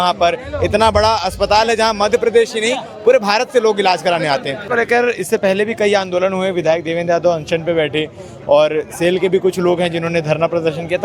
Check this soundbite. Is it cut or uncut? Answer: cut